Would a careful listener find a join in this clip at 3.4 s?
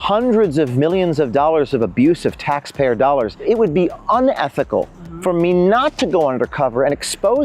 yes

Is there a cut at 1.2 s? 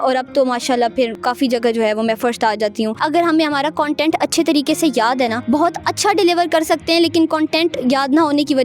yes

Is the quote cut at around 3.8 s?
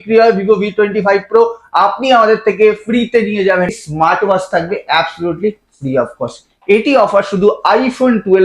yes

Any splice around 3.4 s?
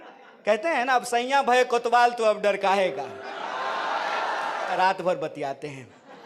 no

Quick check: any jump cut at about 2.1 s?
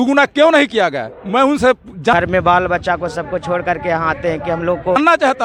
no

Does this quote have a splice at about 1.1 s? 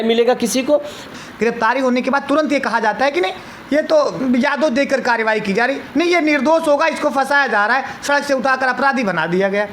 yes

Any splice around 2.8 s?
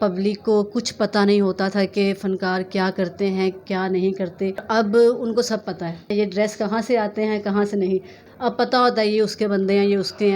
no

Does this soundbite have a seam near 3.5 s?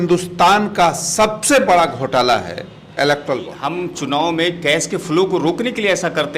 yes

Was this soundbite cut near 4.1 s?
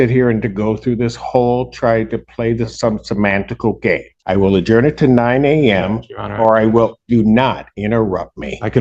yes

